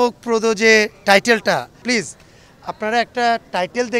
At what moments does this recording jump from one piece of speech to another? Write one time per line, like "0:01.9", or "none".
0:01.8